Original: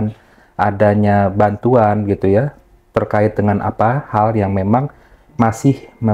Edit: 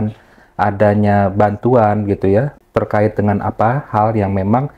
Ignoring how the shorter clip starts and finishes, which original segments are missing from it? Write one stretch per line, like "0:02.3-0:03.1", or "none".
0:02.6-0:02.8